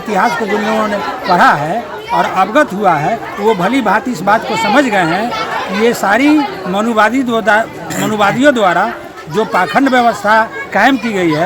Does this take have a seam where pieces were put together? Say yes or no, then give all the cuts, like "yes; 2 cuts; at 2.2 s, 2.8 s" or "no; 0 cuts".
no; 0 cuts